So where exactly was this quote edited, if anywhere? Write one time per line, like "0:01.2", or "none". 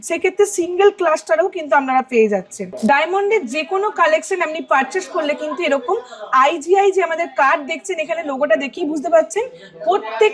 0:02.6